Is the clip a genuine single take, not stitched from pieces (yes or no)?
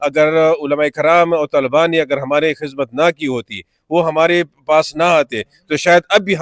yes